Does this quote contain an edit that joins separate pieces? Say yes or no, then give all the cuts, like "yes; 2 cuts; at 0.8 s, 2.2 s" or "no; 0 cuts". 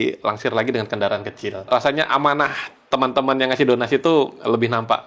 yes; 1 cut; at 1.7 s